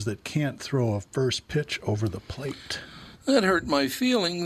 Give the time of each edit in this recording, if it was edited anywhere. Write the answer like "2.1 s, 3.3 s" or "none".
none